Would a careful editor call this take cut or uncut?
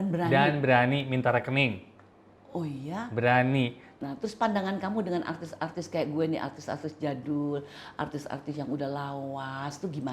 cut